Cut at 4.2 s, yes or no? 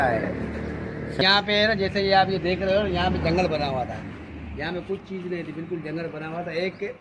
no